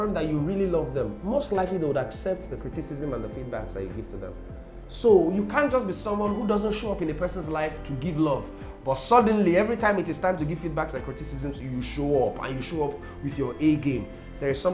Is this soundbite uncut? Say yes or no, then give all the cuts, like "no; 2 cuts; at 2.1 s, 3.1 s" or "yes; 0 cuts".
yes; 0 cuts